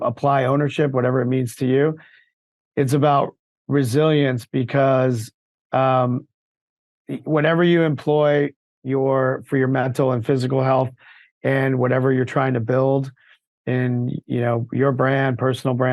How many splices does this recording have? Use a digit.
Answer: 0